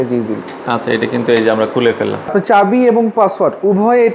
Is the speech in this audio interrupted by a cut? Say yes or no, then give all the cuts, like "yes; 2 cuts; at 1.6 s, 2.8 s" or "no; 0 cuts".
yes; 1 cut; at 2.3 s